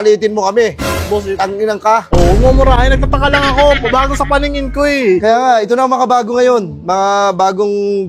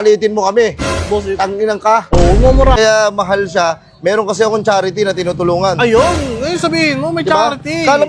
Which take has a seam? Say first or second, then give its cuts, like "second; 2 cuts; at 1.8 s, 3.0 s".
second; 1 cut; at 2.8 s